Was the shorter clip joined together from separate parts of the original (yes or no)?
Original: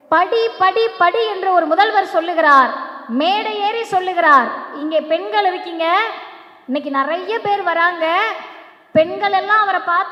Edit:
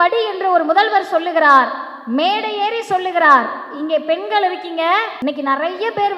yes